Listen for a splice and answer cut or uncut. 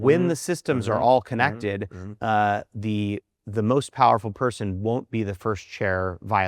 uncut